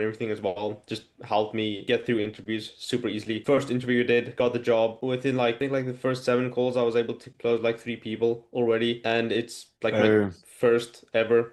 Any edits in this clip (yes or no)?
no